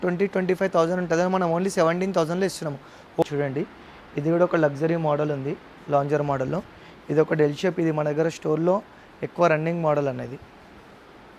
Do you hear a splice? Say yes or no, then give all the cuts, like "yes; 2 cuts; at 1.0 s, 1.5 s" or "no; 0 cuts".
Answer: yes; 1 cut; at 3.2 s